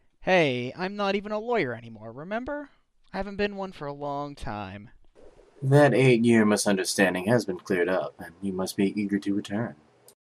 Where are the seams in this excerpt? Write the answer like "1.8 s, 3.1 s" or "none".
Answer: 8.9 s